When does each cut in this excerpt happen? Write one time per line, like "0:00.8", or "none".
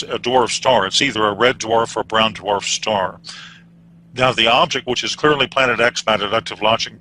0:04.0